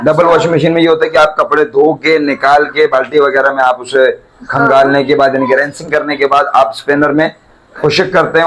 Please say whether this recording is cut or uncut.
uncut